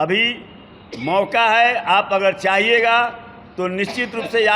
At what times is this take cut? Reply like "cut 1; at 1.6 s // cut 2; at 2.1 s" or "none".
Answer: none